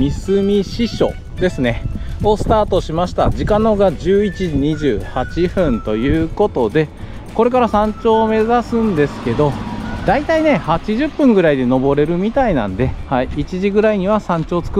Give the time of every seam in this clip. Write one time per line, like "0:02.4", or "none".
none